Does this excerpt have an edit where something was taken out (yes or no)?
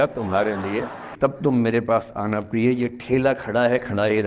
yes